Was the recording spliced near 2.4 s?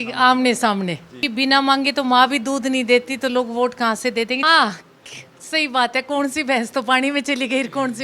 no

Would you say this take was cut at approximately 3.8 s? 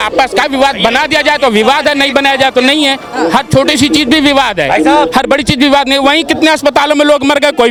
no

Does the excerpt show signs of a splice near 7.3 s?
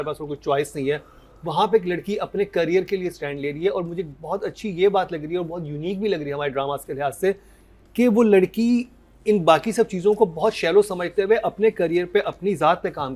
no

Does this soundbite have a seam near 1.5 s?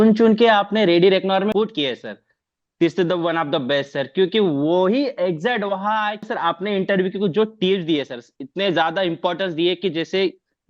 yes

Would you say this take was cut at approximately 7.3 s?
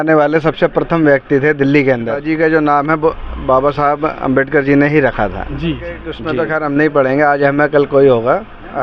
no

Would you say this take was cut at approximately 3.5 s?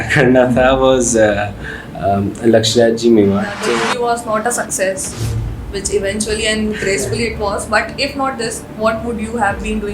yes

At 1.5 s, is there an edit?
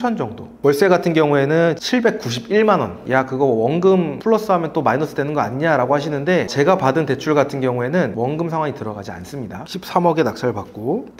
no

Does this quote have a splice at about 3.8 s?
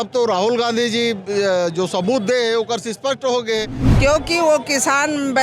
yes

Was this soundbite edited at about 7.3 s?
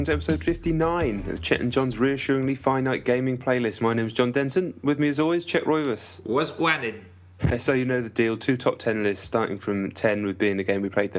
no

